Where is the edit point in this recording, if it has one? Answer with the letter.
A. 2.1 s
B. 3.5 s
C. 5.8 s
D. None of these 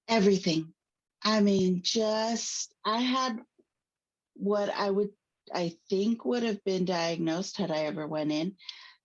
D